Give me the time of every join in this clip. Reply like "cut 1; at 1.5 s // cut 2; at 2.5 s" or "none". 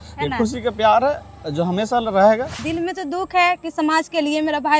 cut 1; at 2.6 s